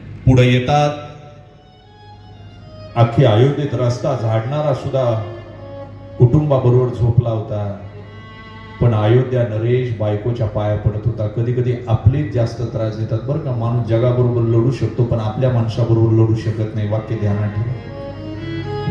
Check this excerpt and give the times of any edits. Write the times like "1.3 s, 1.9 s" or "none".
1.7 s